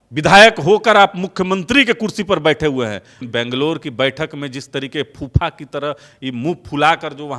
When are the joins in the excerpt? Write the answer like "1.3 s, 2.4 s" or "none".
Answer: 3.2 s